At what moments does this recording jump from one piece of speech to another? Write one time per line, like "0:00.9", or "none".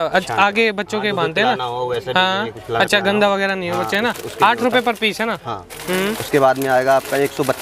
none